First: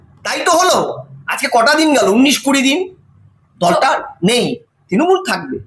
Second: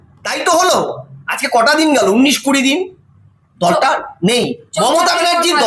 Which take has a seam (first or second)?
first